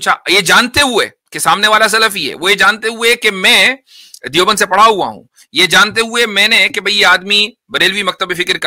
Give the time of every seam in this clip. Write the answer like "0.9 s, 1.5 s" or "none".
none

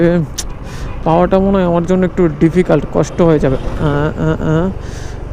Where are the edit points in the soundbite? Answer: none

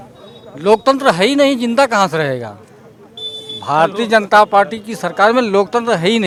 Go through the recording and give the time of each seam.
none

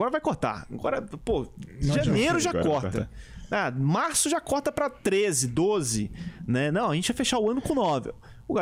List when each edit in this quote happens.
none

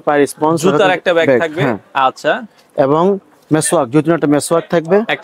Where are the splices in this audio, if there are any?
none

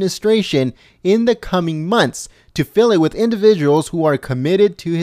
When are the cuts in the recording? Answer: none

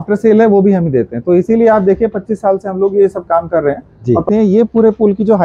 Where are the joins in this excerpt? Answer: 4.2 s

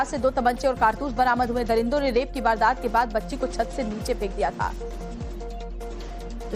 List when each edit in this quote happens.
1.3 s

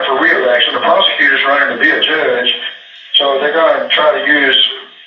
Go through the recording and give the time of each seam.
none

